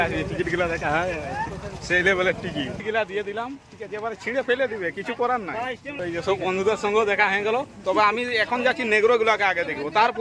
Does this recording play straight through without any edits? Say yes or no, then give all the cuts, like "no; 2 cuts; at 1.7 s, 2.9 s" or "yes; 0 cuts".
no; 2 cuts; at 2.8 s, 5.9 s